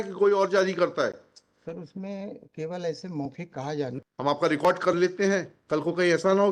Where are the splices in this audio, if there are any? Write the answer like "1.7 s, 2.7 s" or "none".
3.9 s